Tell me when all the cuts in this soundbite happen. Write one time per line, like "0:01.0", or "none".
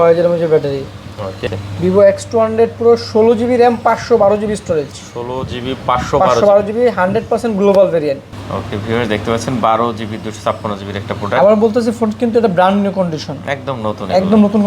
0:01.4
0:08.3

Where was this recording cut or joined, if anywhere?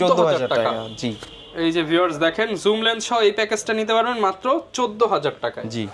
none

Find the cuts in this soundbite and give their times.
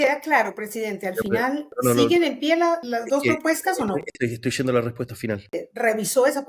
0:02.8
0:05.6

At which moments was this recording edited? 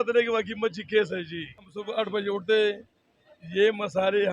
0:01.8

